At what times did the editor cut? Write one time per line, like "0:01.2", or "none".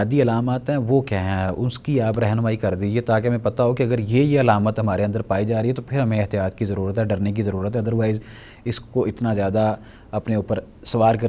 none